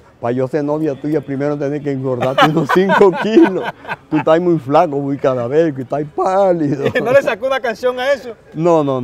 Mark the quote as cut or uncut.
uncut